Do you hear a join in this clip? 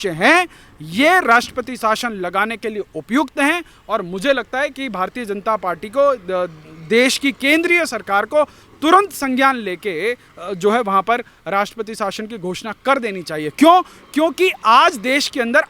no; 0 cuts

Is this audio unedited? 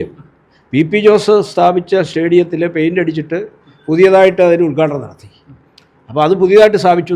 yes; 0 cuts

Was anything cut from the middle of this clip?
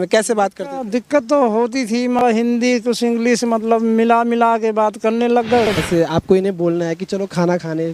yes; 2 cuts; at 2.2 s, 5.7 s

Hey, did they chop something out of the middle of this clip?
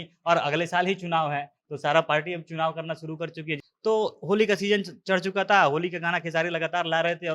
yes; 1 cut; at 3.6 s

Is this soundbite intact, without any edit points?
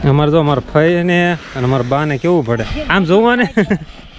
no; 1 cut; at 2.7 s

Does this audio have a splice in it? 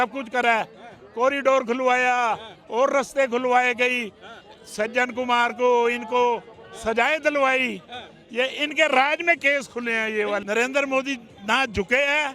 yes; 1 cut; at 10.4 s

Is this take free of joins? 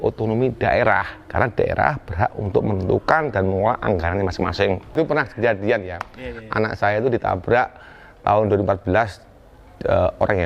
no; 1 cut; at 4.9 s

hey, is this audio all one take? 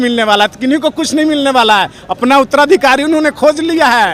yes; 0 cuts

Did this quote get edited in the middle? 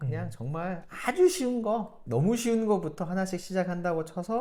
no; 0 cuts

